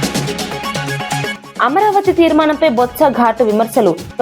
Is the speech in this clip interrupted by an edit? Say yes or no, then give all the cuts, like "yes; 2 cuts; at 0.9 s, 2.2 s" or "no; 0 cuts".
yes; 1 cut; at 1.3 s